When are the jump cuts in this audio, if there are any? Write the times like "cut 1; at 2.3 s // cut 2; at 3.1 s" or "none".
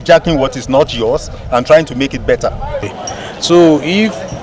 cut 1; at 2.9 s